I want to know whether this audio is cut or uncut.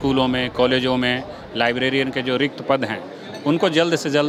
uncut